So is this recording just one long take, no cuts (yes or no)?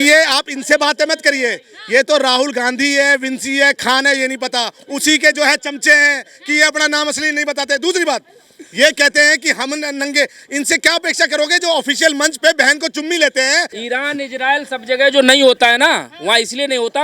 no